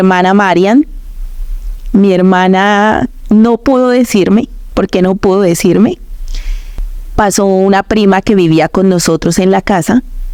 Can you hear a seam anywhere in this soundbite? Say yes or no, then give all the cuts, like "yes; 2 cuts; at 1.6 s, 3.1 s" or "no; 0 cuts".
no; 0 cuts